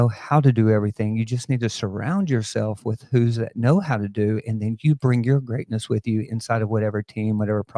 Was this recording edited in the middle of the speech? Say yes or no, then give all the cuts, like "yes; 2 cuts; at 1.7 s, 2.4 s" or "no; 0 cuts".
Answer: no; 0 cuts